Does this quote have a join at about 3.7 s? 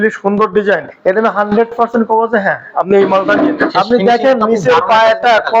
yes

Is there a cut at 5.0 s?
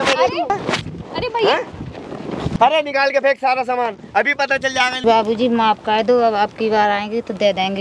yes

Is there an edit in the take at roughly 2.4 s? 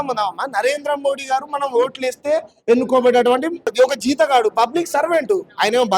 no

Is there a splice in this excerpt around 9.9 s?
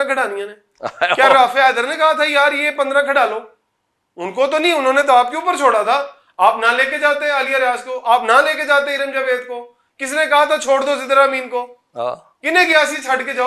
no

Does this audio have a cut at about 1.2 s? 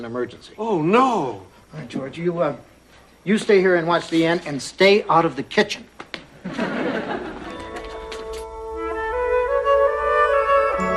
yes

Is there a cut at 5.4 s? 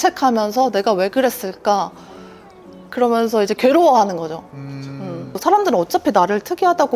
yes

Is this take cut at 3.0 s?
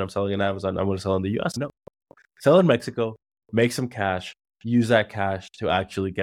no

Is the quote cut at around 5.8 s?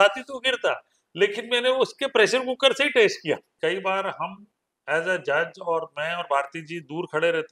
no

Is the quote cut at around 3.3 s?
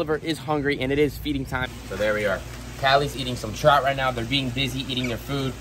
no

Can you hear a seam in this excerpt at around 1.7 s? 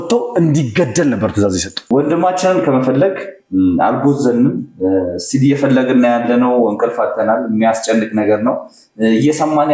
yes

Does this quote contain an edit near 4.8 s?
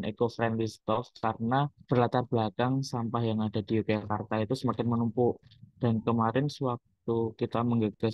no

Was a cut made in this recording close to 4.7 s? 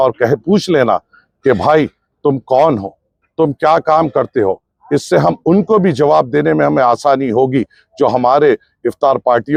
no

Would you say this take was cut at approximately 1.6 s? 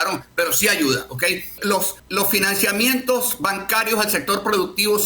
yes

